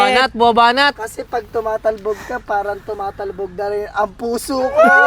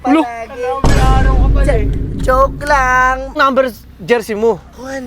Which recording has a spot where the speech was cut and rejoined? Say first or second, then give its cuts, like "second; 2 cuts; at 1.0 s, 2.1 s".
second; 1 cut; at 3.4 s